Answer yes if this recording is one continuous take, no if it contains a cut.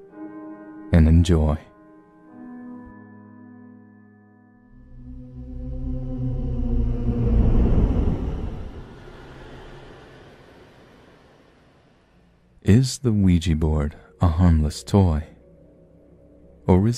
yes